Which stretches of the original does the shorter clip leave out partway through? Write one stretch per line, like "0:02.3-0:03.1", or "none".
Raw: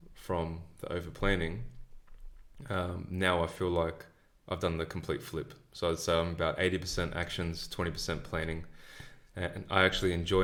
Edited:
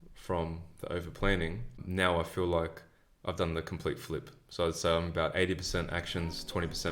0:01.8-0:03.0